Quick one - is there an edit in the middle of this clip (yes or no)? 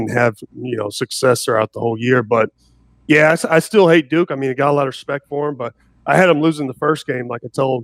no